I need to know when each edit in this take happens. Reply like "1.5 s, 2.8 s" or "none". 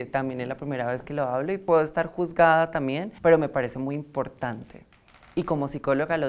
1.6 s, 3.1 s